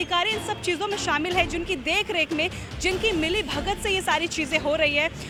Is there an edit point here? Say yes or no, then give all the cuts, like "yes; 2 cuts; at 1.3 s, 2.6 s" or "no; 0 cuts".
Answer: no; 0 cuts